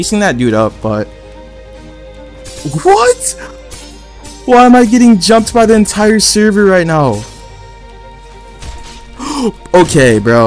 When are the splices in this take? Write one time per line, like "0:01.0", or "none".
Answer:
none